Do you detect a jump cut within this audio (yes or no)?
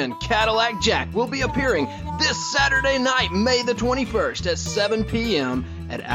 no